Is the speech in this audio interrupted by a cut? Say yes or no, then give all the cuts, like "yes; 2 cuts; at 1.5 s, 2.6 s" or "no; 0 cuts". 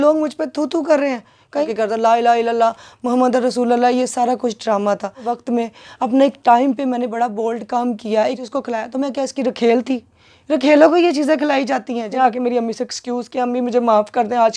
yes; 4 cuts; at 1.6 s, 5.3 s, 8.4 s, 12.1 s